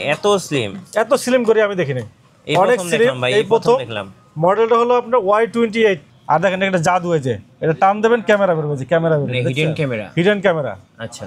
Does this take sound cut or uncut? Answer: cut